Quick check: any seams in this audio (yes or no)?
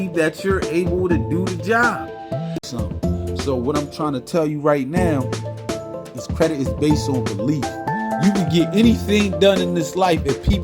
yes